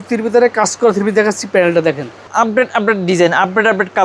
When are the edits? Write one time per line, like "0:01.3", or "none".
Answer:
0:02.3